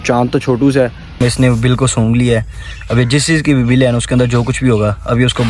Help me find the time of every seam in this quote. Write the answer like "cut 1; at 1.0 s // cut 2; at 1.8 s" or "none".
cut 1; at 1.2 s